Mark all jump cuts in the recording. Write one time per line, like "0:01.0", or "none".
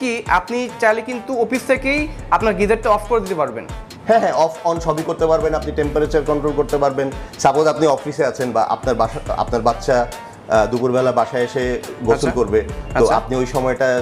none